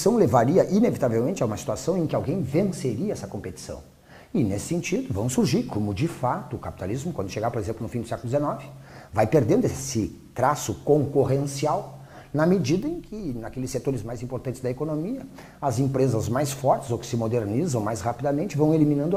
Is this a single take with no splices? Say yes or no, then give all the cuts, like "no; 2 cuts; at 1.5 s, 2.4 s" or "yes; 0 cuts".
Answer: yes; 0 cuts